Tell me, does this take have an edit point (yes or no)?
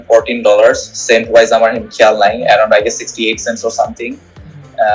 no